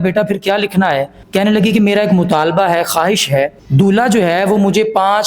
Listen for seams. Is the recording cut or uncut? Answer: cut